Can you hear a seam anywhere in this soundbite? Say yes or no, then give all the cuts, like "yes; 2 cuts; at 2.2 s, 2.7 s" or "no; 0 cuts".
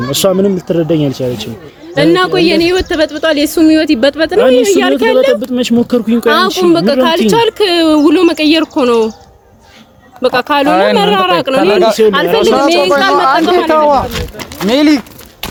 no; 0 cuts